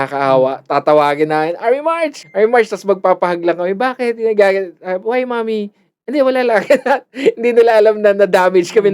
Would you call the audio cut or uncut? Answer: cut